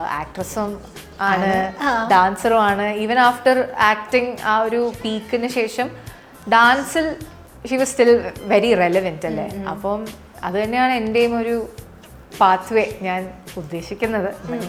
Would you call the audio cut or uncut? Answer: uncut